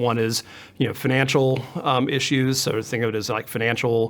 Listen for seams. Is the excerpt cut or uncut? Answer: uncut